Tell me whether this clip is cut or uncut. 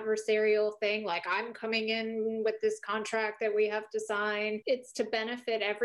uncut